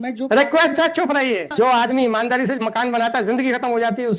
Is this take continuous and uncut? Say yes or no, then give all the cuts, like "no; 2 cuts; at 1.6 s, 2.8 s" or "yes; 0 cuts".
no; 1 cut; at 1.5 s